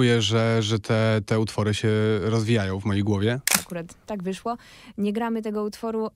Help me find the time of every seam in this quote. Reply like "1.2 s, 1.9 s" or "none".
3.5 s